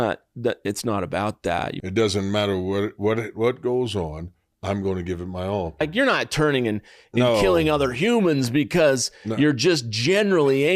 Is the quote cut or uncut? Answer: cut